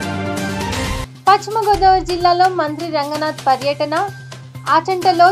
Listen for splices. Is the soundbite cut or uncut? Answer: cut